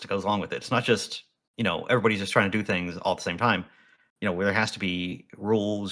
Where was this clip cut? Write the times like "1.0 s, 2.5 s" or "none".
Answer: none